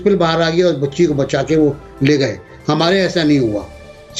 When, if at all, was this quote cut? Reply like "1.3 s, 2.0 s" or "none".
none

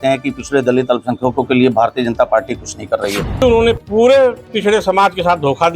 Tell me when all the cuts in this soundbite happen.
3.4 s

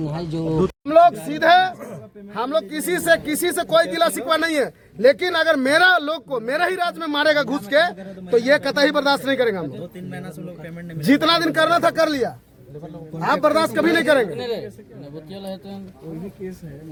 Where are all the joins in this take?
none

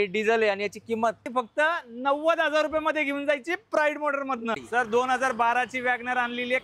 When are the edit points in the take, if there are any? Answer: 1.2 s, 4.6 s

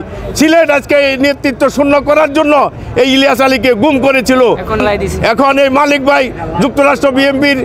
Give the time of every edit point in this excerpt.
none

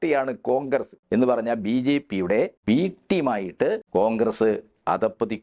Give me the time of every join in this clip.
1.0 s, 2.6 s, 3.8 s

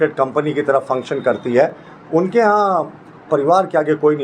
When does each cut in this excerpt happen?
none

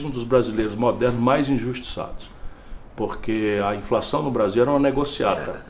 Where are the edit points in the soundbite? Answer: none

